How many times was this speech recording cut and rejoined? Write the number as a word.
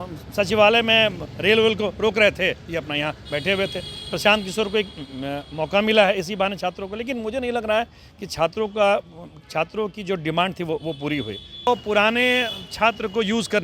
one